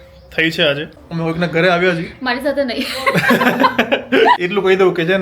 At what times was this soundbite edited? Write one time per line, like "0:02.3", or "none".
0:01.0
0:04.4